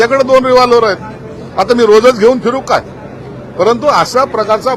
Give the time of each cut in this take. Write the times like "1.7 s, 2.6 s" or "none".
none